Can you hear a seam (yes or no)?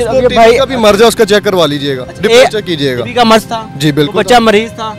no